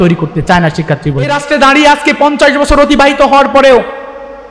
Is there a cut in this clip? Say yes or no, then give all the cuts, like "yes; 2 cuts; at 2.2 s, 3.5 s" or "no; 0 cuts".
yes; 1 cut; at 1.4 s